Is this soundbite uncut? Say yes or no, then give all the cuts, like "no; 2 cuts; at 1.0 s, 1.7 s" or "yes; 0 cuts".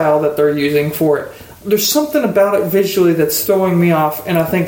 no; 1 cut; at 1.5 s